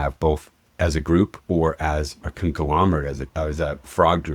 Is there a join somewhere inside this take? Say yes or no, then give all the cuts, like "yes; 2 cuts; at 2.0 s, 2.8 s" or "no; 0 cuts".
yes; 1 cut; at 3.2 s